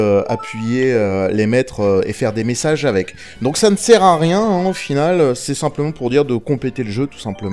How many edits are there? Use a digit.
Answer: 1